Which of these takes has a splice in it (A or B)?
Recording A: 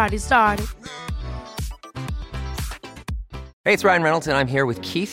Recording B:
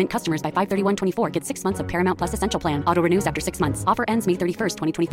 A